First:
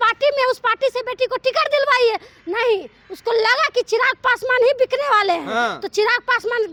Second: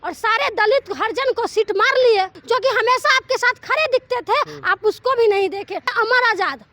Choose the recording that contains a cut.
second; 2 cuts; at 2.4 s, 5.8 s

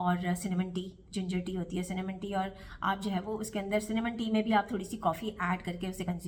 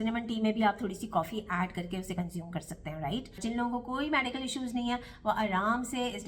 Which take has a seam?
second; 1 cut; at 3.4 s

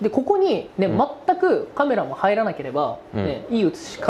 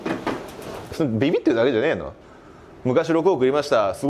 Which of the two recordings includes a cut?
second; 1 cut; at 0.9 s

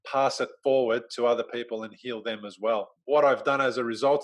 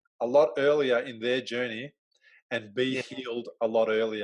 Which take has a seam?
first; 1 cut; at 2.9 s

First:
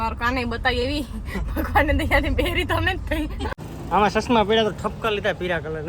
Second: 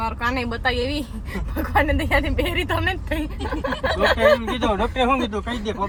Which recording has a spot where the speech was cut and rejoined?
first; 1 cut; at 3.6 s

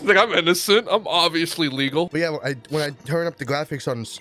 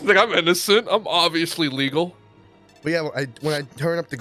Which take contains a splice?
first; 1 cut; at 2.1 s

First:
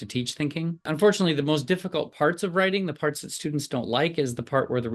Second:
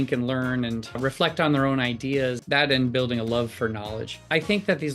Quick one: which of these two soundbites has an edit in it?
second; 2 cuts; at 1.0 s, 2.4 s

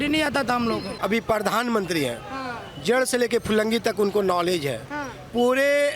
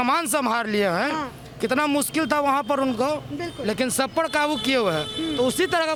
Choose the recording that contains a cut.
first; 1 cut; at 0.9 s

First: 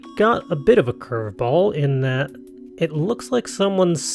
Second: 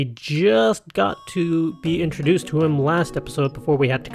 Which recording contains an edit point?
second; 1 cut; at 1.5 s

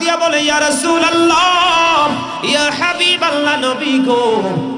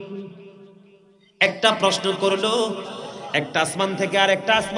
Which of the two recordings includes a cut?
second; 1 cut; at 2.8 s

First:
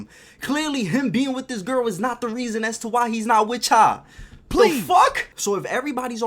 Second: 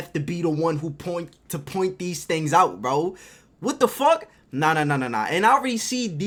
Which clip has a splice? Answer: first; 1 cut; at 5.3 s

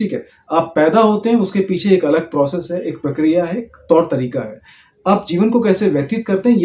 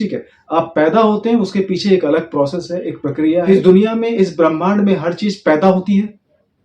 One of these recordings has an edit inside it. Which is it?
second; 1 cut; at 3.4 s

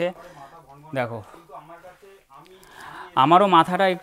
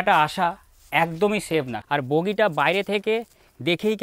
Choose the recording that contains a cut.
second; 1 cut; at 1.8 s

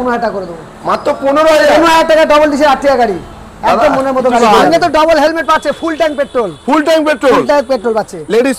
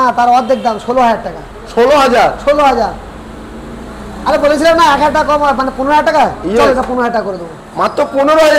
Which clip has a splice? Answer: first; 1 cut; at 4.4 s

